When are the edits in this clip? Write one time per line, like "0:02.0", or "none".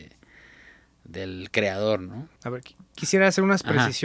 none